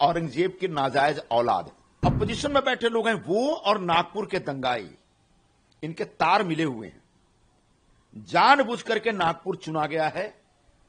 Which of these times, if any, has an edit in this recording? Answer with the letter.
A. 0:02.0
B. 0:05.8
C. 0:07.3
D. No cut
A